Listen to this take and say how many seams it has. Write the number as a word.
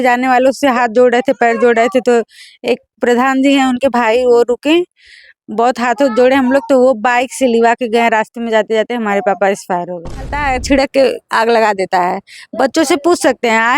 one